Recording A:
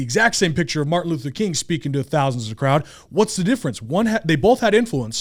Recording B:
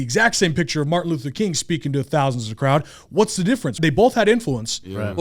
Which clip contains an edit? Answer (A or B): B